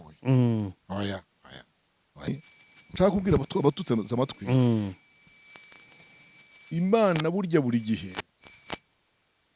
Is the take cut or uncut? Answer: cut